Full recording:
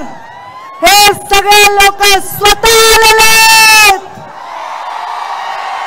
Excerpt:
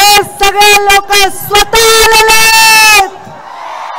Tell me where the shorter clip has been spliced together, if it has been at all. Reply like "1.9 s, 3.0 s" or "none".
none